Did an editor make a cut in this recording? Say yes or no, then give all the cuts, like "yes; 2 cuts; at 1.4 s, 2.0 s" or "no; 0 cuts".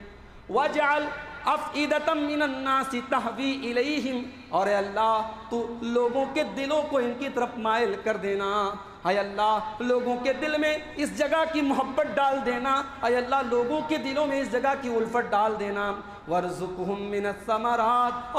no; 0 cuts